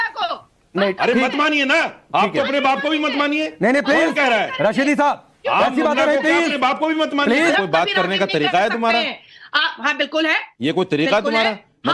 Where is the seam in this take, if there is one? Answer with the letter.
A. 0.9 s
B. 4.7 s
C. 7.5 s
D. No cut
C